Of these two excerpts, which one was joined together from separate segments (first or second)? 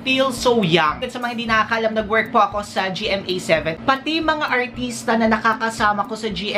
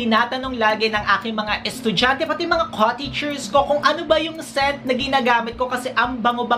first